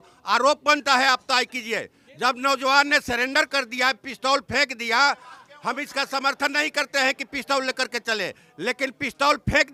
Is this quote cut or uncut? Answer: uncut